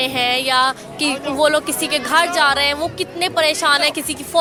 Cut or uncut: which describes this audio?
uncut